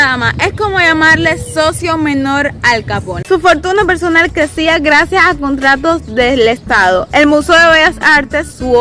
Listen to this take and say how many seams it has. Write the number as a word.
one